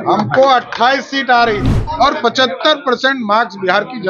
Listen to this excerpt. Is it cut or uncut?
cut